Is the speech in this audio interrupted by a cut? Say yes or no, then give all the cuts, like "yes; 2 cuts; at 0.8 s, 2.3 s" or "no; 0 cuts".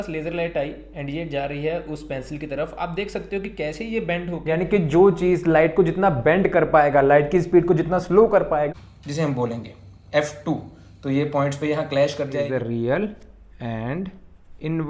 yes; 3 cuts; at 4.4 s, 8.7 s, 12.5 s